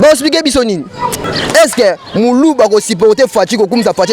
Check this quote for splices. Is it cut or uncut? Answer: cut